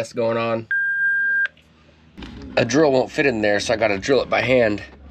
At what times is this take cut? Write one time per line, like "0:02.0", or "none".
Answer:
0:02.3